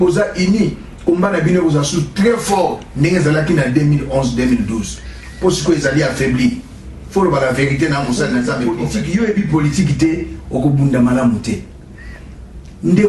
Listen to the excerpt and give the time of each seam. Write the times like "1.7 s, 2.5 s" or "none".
8.6 s